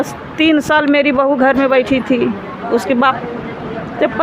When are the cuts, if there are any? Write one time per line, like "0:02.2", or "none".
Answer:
0:03.2